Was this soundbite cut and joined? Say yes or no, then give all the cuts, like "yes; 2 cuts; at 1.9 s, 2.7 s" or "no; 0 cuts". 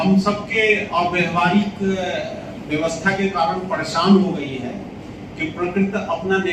no; 0 cuts